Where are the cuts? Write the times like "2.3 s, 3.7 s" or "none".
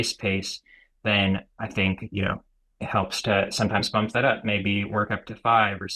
none